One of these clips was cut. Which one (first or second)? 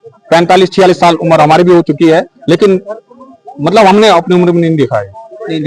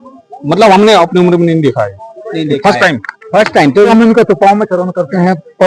second